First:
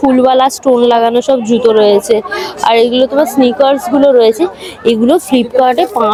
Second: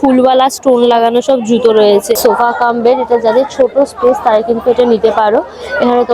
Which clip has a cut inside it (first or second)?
second